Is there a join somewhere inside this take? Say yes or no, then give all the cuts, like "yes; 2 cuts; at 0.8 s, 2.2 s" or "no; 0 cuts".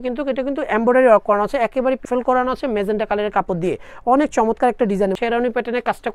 yes; 2 cuts; at 2.1 s, 5.2 s